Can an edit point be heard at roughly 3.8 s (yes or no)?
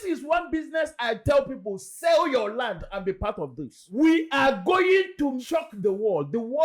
yes